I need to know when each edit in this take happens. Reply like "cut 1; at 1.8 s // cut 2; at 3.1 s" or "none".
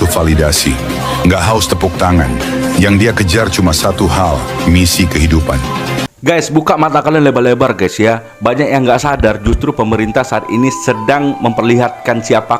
cut 1; at 6.1 s